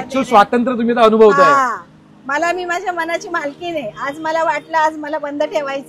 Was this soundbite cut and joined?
no; 0 cuts

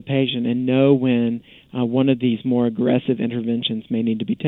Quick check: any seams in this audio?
no; 0 cuts

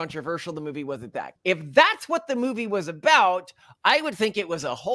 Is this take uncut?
no; 1 cut; at 1.3 s

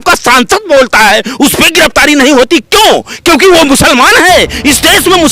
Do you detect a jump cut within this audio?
no; 0 cuts

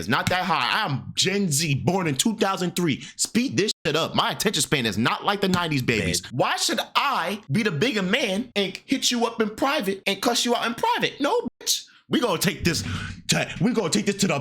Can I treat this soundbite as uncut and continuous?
no; 4 cuts; at 6.2 s, 7.4 s, 8.5 s, 10.0 s

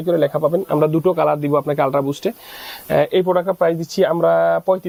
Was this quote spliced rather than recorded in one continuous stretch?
no; 0 cuts

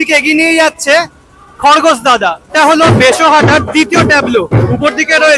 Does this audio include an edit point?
yes; 1 cut; at 2.4 s

